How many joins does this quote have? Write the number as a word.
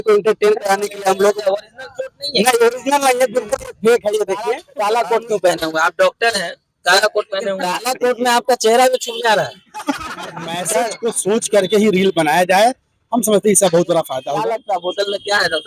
four